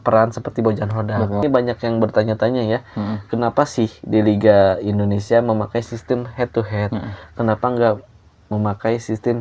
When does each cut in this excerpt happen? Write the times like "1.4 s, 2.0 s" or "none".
1.4 s